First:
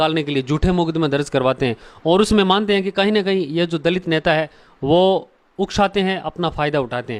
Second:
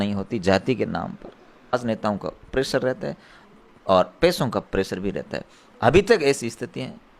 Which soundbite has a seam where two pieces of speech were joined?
second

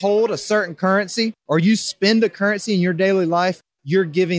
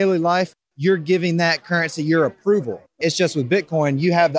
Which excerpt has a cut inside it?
second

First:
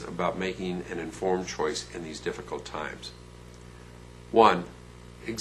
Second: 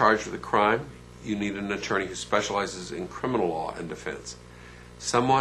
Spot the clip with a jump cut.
second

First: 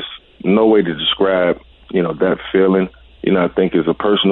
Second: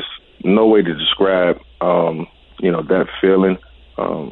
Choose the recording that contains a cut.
first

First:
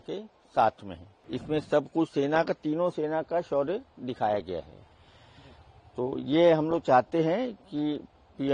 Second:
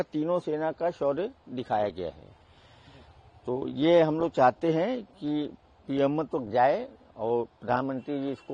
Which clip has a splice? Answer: first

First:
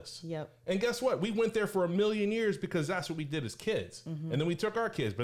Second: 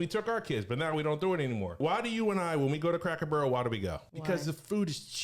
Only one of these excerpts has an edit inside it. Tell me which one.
second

